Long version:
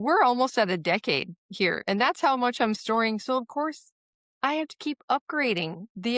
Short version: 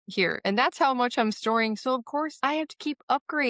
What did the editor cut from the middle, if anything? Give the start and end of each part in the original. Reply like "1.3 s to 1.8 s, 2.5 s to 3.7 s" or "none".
3.8 s to 4.3 s